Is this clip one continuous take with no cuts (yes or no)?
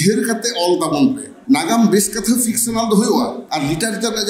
no